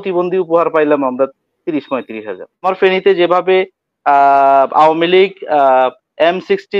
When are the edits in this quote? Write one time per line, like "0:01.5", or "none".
0:02.6